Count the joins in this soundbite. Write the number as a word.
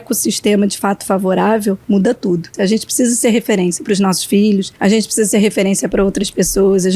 two